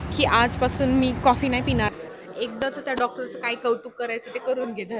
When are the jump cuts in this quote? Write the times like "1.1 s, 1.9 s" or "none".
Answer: 1.9 s